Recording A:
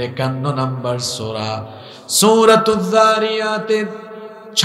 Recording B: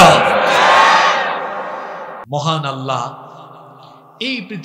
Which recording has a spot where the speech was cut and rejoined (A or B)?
B